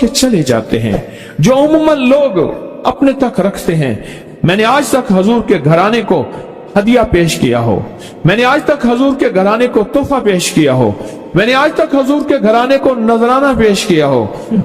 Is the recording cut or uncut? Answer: cut